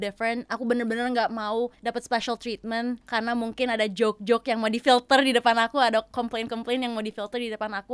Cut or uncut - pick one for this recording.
cut